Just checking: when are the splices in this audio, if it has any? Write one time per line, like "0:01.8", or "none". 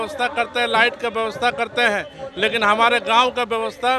none